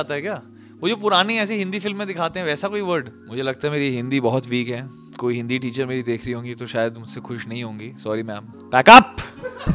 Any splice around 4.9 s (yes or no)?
no